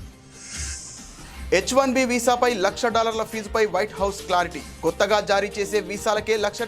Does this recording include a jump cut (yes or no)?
yes